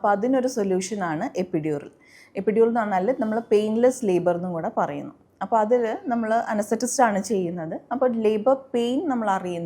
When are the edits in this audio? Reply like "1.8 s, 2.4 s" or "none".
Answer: none